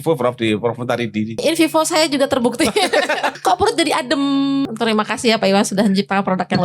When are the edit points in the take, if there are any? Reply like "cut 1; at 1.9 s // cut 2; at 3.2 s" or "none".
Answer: cut 1; at 1.4 s // cut 2; at 3.4 s // cut 3; at 4.6 s